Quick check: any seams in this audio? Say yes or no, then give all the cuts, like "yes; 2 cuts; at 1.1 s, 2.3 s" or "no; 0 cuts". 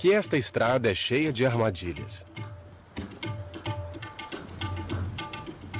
no; 0 cuts